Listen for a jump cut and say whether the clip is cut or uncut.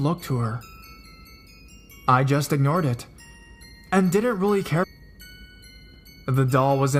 uncut